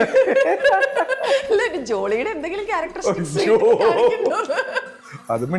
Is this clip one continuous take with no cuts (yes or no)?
yes